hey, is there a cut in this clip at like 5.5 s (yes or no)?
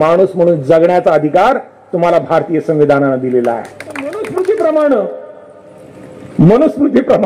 no